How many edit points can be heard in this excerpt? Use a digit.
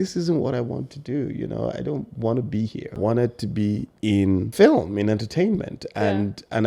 2